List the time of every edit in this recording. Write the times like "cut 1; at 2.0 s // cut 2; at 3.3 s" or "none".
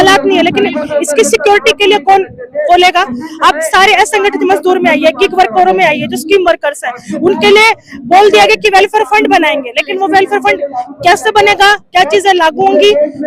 none